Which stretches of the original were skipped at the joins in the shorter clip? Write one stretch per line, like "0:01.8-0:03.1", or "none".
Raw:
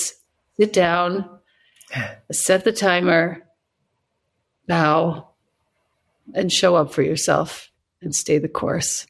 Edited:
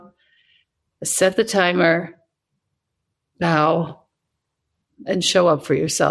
none